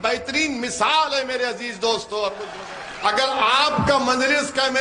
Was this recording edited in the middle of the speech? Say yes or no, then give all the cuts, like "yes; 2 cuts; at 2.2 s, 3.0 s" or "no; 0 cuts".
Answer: yes; 1 cut; at 2.5 s